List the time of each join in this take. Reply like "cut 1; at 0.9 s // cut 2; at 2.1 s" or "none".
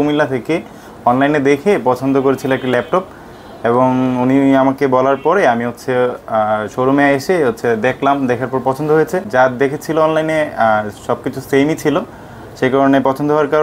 cut 1; at 9.2 s

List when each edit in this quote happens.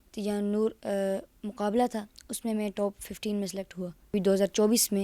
cut 1; at 4.1 s

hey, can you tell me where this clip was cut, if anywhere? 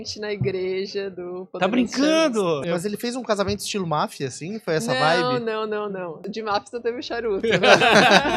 cut 1; at 2.6 s // cut 2; at 6.2 s

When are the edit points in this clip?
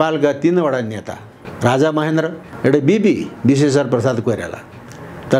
cut 1; at 1.4 s // cut 2; at 2.4 s

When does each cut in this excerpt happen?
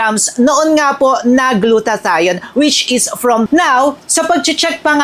cut 1; at 3.5 s

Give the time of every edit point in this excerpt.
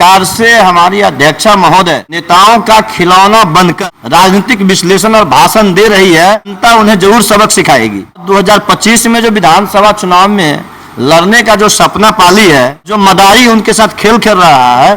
cut 1; at 2.2 s // cut 2; at 3.8 s // cut 3; at 6.6 s // cut 4; at 8.2 s // cut 5; at 12.9 s

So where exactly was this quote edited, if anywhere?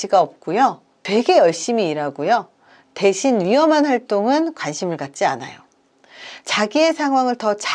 cut 1; at 0.9 s

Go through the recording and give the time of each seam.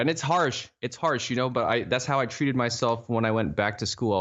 none

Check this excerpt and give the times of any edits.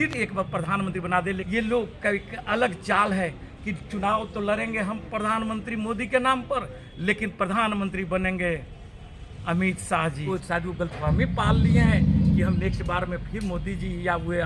cut 1; at 1.4 s // cut 2; at 10.2 s

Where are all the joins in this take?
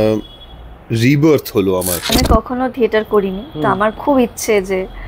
cut 1; at 2.1 s

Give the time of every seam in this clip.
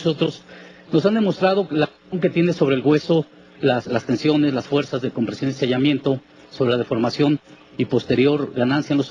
none

